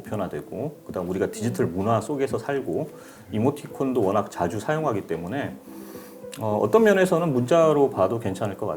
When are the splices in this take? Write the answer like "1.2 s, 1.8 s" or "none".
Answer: none